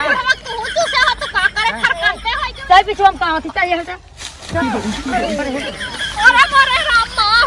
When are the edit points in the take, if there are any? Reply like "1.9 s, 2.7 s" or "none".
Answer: none